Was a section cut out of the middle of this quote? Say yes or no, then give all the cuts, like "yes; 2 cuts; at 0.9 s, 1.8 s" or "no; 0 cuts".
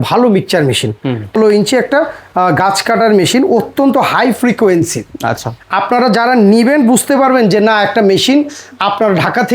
yes; 1 cut; at 1.3 s